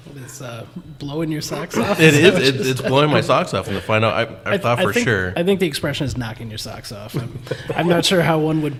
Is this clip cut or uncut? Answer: uncut